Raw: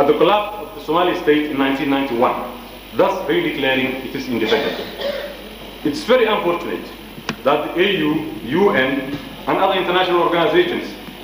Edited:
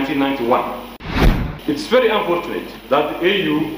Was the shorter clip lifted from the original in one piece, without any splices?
no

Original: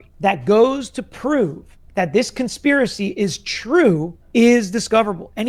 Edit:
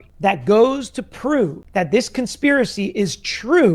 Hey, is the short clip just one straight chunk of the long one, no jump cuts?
no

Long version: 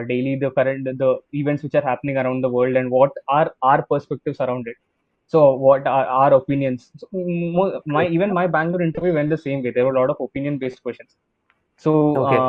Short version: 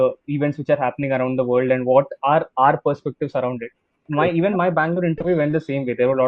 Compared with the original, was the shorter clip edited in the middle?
yes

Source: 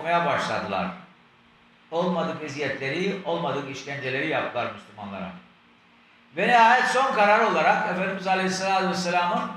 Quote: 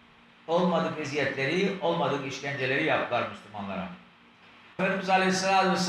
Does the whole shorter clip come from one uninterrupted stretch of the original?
no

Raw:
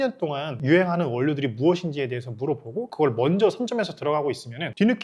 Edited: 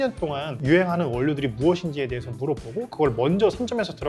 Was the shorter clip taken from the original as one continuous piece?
yes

